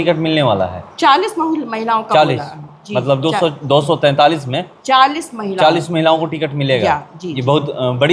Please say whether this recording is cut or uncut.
uncut